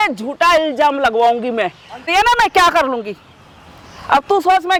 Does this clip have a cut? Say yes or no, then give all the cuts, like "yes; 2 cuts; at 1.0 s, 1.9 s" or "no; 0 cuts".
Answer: no; 0 cuts